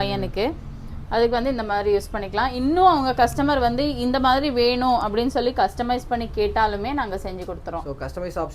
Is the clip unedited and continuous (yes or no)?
yes